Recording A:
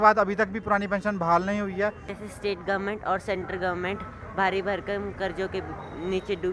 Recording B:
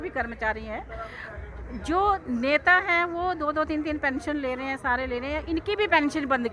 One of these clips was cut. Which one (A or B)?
A